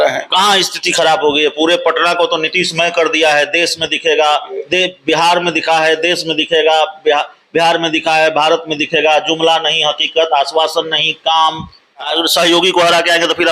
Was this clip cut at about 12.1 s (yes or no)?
yes